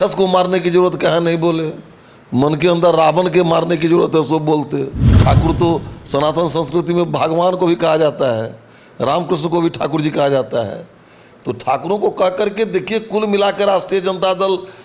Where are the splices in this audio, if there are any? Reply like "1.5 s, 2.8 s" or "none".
5.1 s